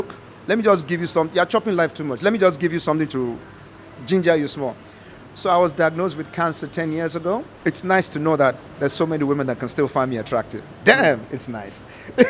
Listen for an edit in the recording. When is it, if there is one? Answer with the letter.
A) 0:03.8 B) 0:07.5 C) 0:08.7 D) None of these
B